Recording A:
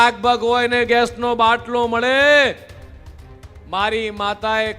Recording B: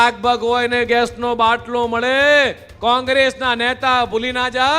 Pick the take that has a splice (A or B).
B